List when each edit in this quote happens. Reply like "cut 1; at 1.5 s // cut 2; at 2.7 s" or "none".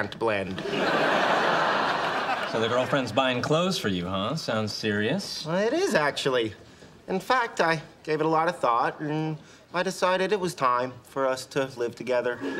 cut 1; at 2.7 s

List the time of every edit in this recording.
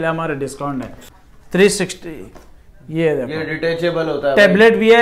cut 1; at 1.0 s

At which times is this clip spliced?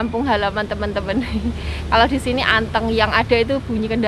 none

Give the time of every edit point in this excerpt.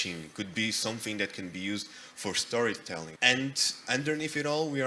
cut 1; at 3.1 s

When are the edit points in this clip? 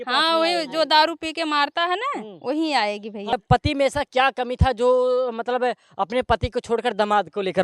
cut 1; at 3.4 s

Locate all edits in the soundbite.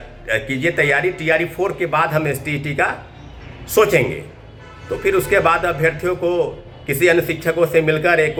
none

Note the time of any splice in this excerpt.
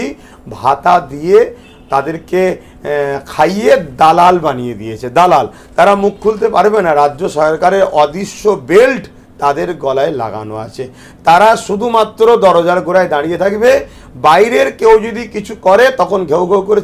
none

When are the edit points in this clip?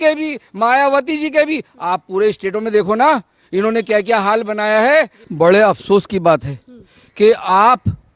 cut 1; at 5.2 s

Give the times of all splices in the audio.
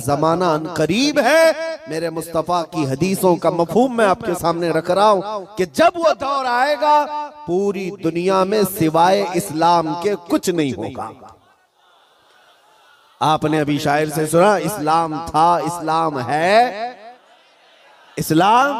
none

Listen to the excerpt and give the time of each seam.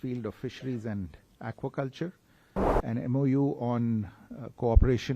cut 1; at 2.8 s

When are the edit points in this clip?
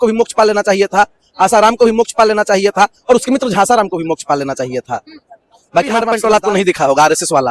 cut 1; at 6.1 s

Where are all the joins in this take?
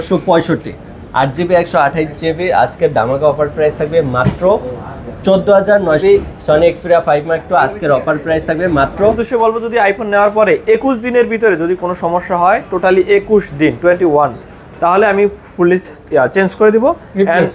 cut 1; at 6.0 s // cut 2; at 9.2 s

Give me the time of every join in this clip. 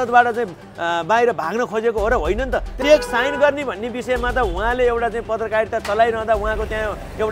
cut 1; at 2.7 s

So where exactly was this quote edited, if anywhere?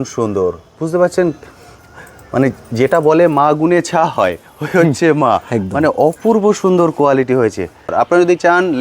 cut 1; at 7.9 s

